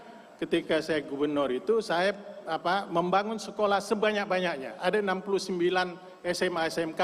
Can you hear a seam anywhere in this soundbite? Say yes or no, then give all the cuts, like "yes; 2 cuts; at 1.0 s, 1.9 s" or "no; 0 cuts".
no; 0 cuts